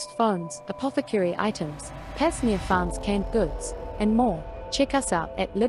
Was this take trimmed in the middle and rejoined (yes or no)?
no